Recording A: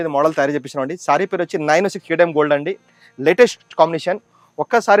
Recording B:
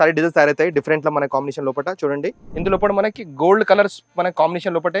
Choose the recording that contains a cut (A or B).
B